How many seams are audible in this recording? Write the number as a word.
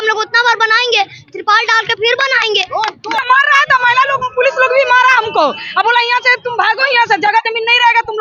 one